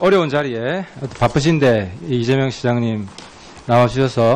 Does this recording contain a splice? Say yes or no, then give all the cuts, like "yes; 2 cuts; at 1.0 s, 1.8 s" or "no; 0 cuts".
no; 0 cuts